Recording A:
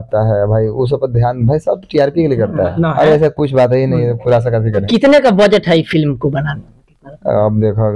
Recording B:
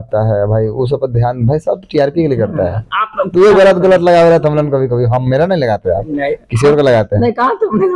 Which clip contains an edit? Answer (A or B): A